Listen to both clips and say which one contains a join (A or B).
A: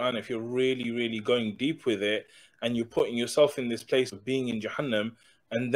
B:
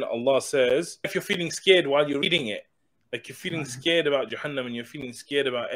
B